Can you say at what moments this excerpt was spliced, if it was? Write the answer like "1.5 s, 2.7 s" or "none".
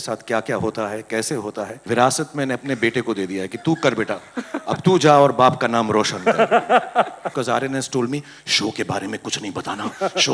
1.7 s, 7.3 s